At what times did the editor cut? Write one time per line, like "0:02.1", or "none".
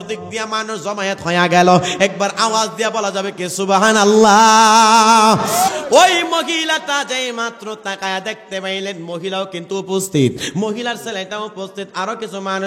0:05.7